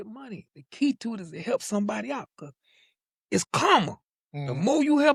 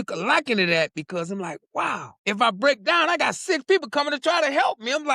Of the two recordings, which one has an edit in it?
second; 1 cut; at 2.1 s

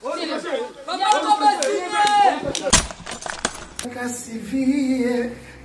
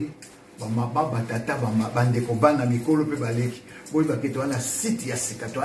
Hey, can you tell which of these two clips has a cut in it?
first; 1 cut; at 2.7 s

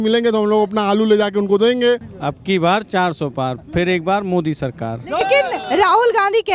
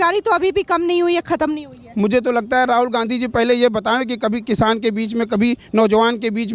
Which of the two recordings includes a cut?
first; 2 cuts; at 2.1 s, 5.2 s

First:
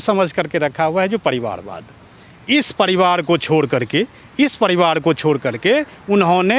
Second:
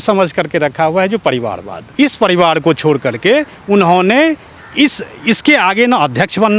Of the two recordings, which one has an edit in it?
second; 1 cut; at 1.8 s

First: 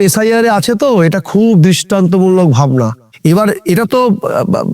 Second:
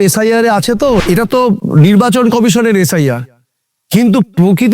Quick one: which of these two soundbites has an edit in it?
second; 1 cut; at 1.3 s

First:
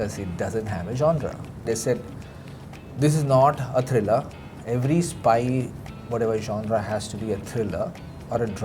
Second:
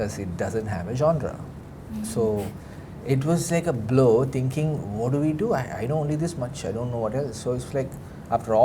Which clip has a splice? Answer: first; 1 cut; at 1.6 s

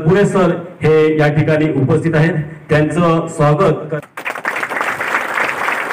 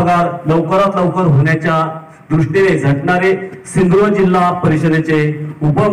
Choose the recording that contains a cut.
first; 1 cut; at 3.9 s

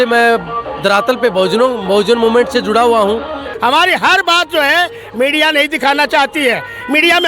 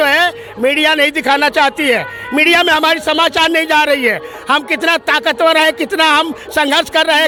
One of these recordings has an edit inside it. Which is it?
first; 1 cut; at 3.4 s

